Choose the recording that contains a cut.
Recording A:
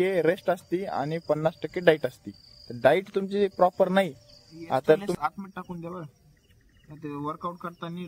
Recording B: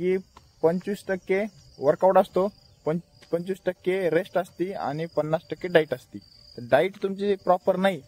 A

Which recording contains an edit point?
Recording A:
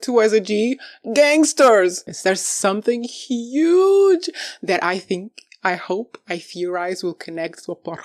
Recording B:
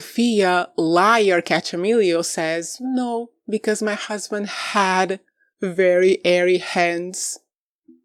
A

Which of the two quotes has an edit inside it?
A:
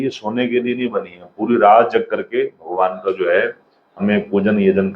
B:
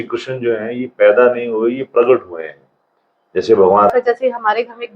B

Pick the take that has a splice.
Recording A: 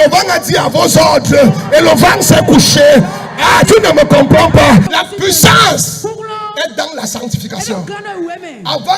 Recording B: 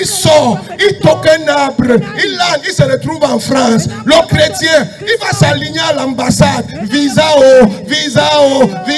A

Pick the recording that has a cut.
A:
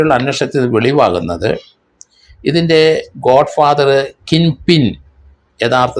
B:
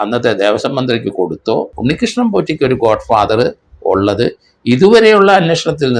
B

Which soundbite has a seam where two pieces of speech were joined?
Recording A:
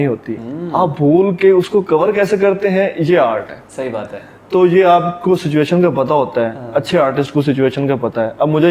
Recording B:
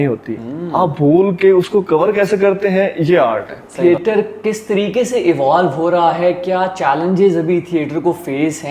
B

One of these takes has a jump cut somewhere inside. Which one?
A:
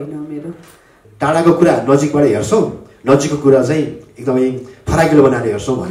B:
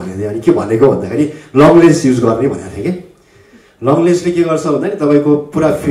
A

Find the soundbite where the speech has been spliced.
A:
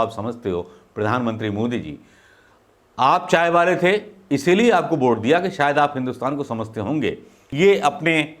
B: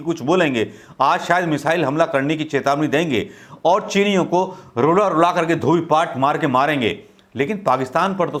A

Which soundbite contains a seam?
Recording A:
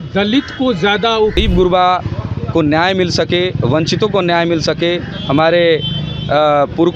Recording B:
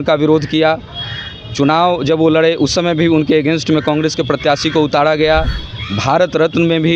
A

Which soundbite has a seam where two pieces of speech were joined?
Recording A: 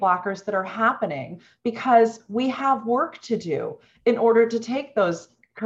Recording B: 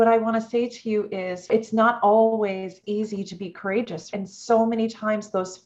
B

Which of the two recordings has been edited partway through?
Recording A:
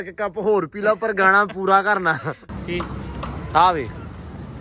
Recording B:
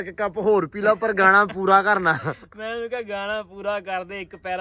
A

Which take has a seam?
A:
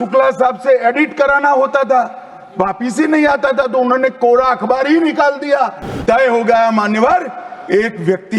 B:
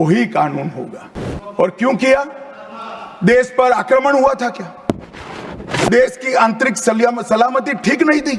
A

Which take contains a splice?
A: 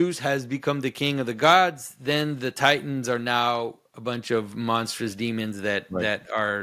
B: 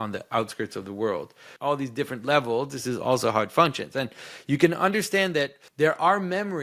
B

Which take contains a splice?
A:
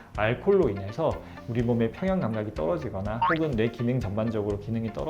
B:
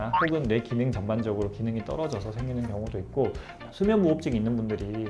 B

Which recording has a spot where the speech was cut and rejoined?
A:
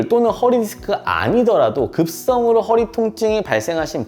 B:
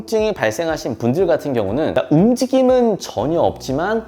B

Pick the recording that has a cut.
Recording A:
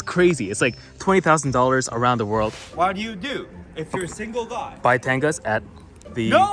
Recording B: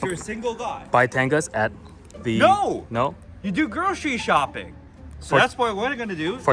A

